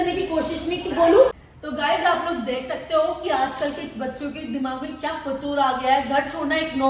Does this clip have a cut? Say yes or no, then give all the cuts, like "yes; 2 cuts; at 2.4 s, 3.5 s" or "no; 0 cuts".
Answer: yes; 1 cut; at 1.3 s